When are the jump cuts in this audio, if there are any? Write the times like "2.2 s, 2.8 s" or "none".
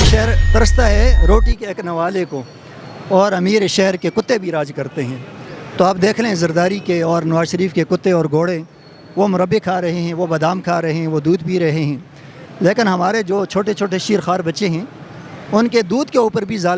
none